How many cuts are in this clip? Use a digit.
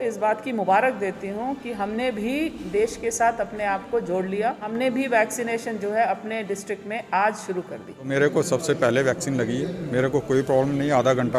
2